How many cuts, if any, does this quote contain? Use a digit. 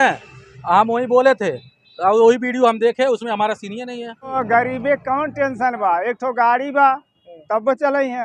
1